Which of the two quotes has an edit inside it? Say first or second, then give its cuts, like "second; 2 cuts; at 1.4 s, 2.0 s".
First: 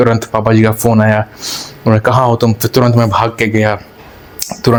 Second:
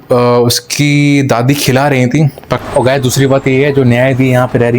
second; 1 cut; at 2.6 s